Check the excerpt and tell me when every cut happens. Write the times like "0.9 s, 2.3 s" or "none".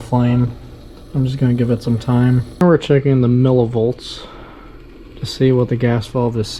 2.6 s